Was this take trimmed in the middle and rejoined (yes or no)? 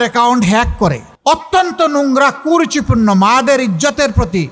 yes